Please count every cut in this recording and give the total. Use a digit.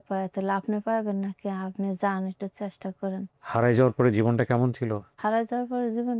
2